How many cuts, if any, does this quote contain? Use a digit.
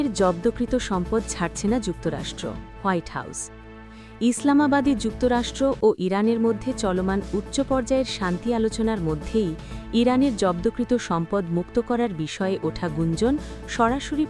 0